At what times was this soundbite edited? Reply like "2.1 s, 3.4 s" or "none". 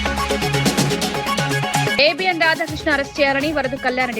1.9 s